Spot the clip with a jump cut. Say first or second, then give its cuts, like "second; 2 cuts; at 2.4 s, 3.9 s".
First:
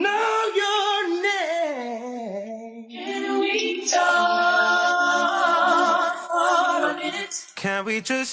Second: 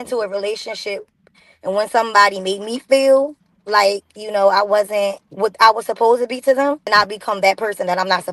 second; 2 cuts; at 5.2 s, 6.9 s